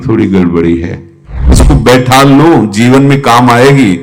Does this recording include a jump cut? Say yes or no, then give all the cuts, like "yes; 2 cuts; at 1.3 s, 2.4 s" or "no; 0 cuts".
yes; 1 cut; at 1.5 s